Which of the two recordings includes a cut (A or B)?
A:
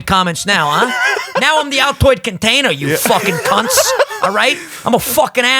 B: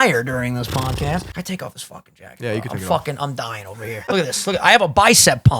B